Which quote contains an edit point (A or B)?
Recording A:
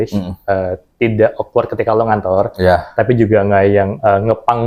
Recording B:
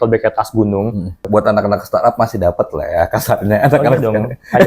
B